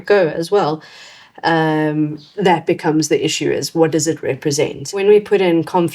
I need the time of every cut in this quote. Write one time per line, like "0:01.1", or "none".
0:05.0